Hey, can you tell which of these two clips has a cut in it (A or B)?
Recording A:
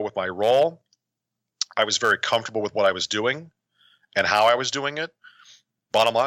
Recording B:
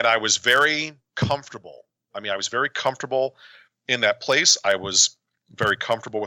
B